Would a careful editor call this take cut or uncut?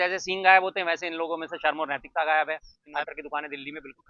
cut